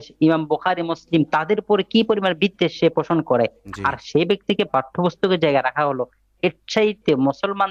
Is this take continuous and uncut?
yes; 0 cuts

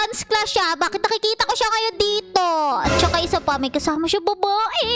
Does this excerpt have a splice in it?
no; 0 cuts

